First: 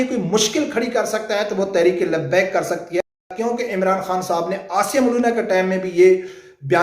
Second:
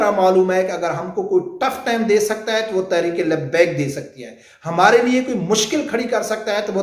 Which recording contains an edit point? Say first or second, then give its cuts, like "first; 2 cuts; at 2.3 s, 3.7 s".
first; 1 cut; at 3.3 s